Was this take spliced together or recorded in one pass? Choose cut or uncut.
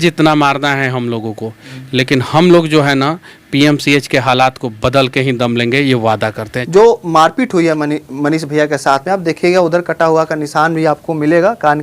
cut